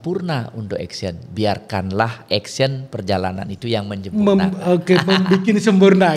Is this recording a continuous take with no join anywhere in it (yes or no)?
yes